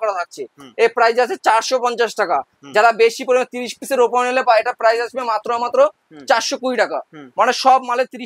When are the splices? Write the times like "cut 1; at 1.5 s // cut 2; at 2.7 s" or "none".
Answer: none